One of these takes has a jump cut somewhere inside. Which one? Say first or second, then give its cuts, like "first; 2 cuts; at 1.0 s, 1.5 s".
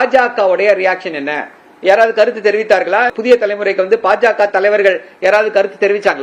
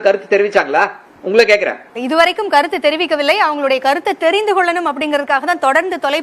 first; 1 cut; at 3.1 s